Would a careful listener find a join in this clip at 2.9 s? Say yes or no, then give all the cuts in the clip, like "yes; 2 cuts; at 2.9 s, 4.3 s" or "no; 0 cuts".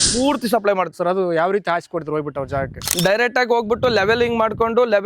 no; 1 cut; at 0.9 s